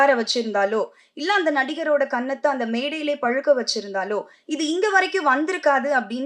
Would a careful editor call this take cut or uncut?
uncut